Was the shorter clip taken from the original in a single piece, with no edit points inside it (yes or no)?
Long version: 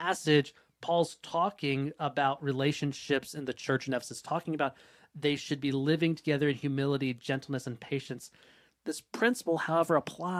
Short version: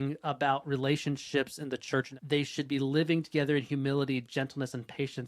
no